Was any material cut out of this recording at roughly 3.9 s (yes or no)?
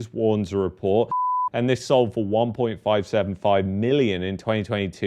no